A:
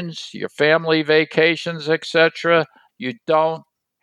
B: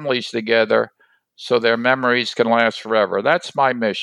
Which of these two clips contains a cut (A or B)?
A